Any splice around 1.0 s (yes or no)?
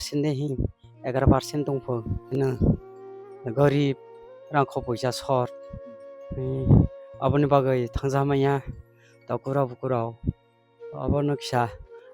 no